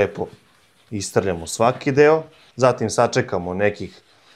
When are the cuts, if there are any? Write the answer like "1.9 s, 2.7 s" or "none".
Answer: 2.4 s

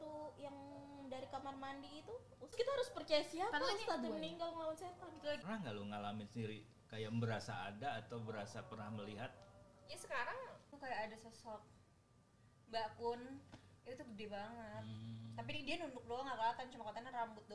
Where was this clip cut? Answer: 2.5 s, 5.4 s, 10.6 s

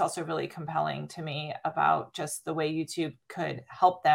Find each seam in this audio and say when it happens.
3.2 s

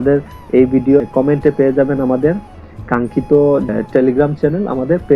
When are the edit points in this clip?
1.1 s, 3.7 s

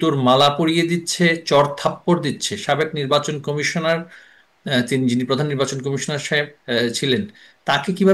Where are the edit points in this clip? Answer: none

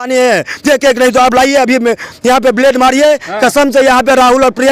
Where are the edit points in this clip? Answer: none

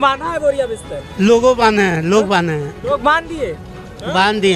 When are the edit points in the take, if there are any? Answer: none

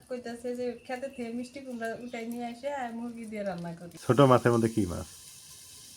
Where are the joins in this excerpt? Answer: 3.9 s

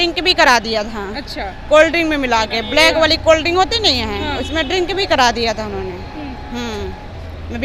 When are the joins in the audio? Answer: none

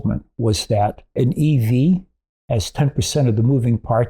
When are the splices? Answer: 1.1 s

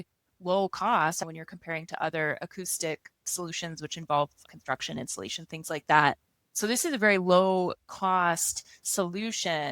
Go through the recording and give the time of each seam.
1.2 s, 6.6 s

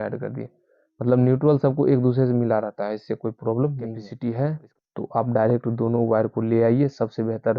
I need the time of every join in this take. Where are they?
4.1 s

